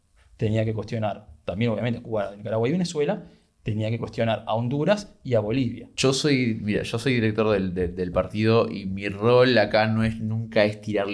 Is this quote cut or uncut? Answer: cut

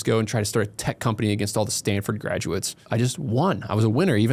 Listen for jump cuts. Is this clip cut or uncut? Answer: cut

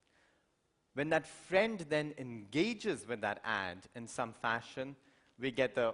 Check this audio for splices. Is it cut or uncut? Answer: cut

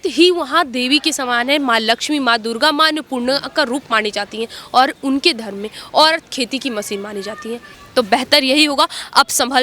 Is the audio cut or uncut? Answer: cut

